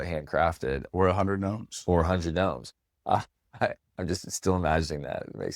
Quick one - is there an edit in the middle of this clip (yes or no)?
yes